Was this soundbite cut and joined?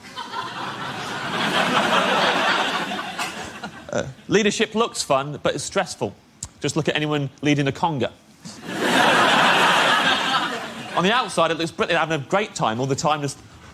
no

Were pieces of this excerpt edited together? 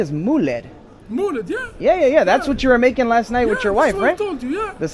no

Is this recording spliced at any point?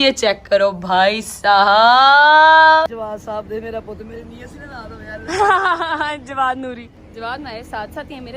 yes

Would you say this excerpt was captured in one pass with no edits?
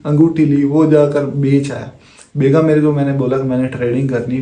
yes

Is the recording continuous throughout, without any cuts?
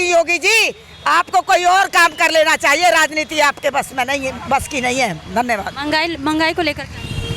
yes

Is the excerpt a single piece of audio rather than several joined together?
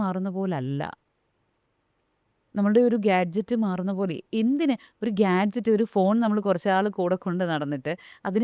yes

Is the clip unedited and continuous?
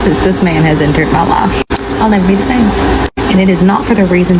yes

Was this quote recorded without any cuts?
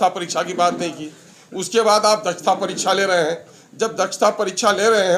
yes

